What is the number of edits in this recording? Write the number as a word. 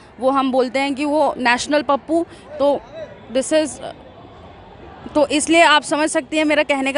zero